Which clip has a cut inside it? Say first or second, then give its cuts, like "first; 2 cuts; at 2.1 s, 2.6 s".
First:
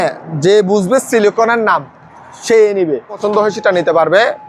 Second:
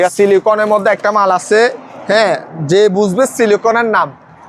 first; 1 cut; at 3.2 s